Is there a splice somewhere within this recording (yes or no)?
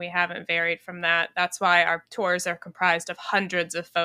yes